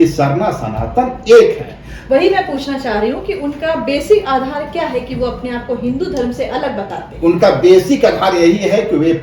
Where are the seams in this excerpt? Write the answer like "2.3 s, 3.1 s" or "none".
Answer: none